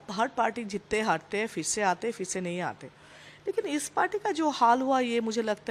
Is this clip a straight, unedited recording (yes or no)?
yes